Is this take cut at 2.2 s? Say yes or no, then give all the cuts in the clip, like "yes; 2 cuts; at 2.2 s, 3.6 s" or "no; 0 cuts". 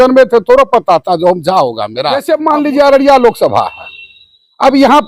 yes; 1 cut; at 2.2 s